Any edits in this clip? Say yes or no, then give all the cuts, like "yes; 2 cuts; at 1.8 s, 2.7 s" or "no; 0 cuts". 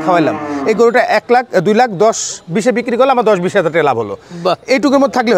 no; 0 cuts